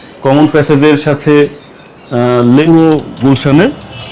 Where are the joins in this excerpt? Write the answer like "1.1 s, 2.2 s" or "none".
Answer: 2.6 s